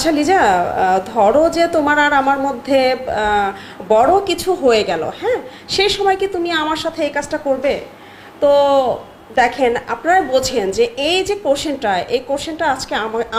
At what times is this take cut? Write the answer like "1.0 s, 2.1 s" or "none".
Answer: none

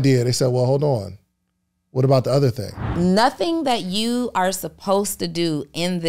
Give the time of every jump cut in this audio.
2.9 s

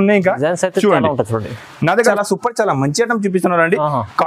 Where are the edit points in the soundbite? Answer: 2.1 s

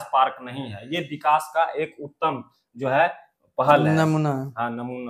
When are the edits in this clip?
none

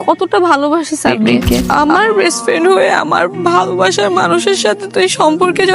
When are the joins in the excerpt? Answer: 1.6 s

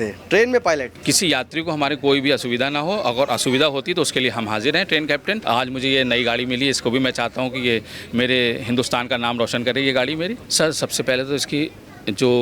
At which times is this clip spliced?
0.9 s, 5.4 s, 10.4 s

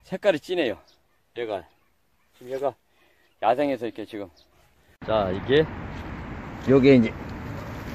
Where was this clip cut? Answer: 5.0 s

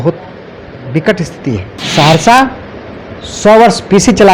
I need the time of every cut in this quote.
1.8 s

